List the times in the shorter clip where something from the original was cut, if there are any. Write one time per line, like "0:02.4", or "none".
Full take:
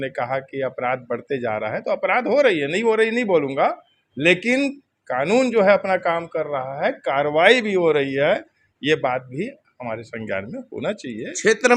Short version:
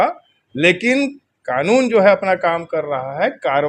none